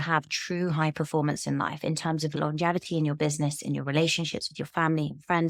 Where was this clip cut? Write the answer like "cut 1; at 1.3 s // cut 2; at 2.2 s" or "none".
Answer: none